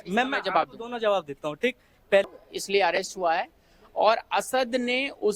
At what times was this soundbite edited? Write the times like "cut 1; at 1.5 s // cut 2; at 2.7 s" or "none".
cut 1; at 2.3 s